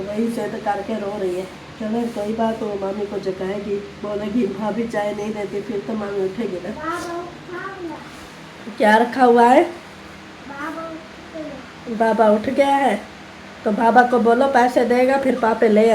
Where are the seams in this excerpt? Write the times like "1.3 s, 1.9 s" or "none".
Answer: none

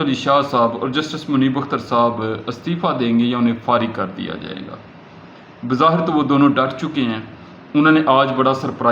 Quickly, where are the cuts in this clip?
none

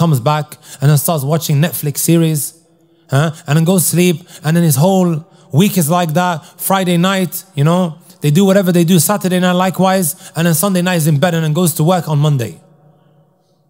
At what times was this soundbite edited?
none

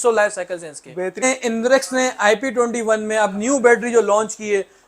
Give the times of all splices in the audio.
1.2 s

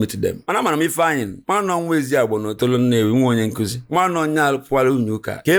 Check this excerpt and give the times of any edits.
none

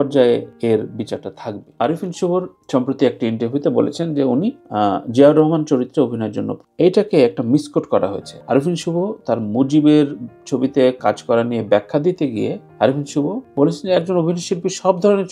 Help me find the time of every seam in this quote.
1.7 s

